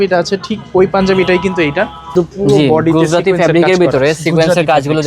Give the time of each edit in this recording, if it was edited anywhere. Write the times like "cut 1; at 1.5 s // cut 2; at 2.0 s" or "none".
cut 1; at 2.1 s

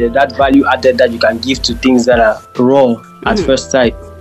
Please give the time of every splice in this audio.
cut 1; at 2.5 s // cut 2; at 3.1 s

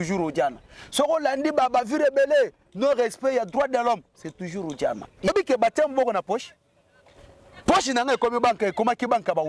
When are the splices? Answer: cut 1; at 5.3 s

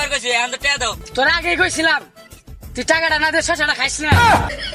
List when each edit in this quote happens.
cut 1; at 1.0 s

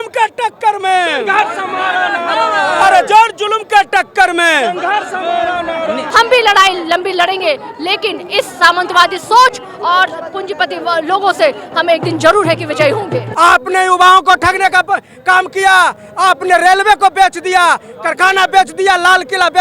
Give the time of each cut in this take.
cut 1; at 6.1 s // cut 2; at 13.3 s

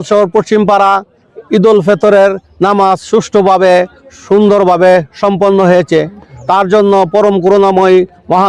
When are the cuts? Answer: none

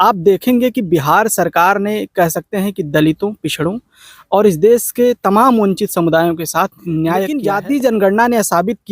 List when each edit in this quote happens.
cut 1; at 7.3 s

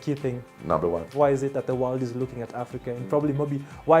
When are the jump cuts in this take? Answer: cut 1; at 1.1 s

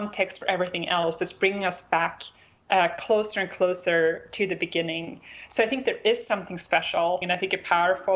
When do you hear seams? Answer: cut 1; at 7.2 s

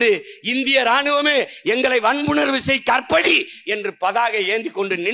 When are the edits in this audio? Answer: none

